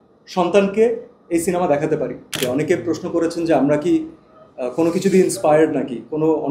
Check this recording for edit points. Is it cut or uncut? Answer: cut